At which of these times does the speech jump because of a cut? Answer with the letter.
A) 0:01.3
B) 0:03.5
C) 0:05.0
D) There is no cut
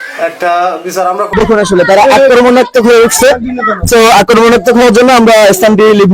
A